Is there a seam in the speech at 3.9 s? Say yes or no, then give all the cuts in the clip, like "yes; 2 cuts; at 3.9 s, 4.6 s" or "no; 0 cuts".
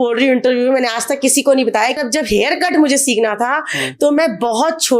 no; 1 cut; at 2.0 s